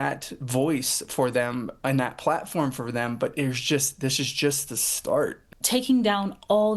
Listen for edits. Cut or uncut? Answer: cut